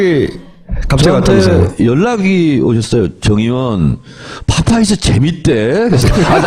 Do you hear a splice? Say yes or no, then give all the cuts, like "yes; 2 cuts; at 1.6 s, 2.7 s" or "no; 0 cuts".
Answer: no; 0 cuts